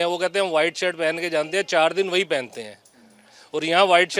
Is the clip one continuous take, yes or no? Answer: yes